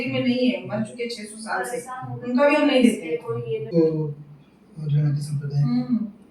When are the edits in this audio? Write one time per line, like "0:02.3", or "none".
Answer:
0:03.7